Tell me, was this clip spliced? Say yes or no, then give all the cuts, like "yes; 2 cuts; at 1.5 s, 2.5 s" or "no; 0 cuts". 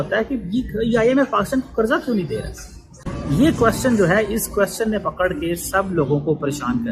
no; 0 cuts